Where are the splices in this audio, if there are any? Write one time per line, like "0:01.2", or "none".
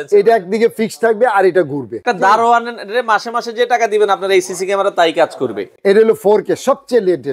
0:02.1
0:05.7

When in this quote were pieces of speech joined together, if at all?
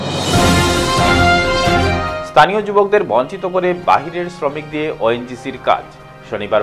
0:01.9

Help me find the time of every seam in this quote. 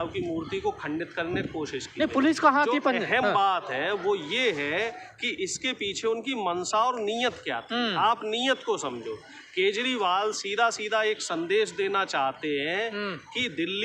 none

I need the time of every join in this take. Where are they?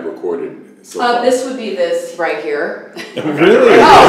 none

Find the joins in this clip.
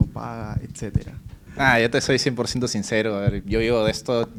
none

